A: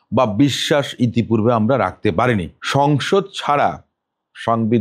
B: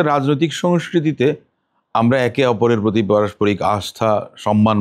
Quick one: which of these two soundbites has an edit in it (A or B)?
A